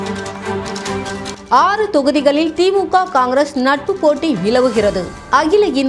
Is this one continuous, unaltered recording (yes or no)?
yes